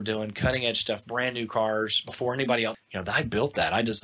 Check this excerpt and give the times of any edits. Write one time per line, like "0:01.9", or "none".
0:02.8